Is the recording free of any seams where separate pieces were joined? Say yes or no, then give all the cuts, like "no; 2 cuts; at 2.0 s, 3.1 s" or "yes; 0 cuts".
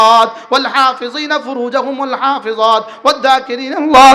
yes; 0 cuts